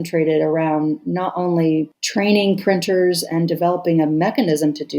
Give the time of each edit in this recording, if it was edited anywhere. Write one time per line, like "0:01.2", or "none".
0:02.0